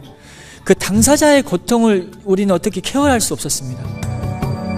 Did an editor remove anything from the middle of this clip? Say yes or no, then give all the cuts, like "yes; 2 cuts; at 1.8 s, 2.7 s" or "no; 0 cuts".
no; 0 cuts